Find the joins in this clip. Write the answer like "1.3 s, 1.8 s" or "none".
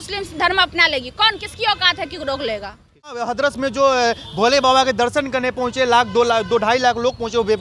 3.2 s